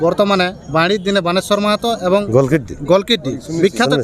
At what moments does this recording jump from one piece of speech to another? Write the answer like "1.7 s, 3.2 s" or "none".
2.3 s